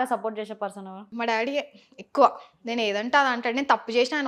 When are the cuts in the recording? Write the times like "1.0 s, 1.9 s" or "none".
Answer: 1.0 s